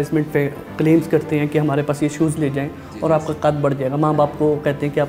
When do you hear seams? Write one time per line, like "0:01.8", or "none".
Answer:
none